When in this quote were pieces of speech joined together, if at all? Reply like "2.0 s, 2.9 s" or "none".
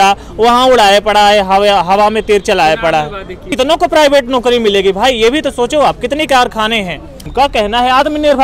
3.5 s, 7.2 s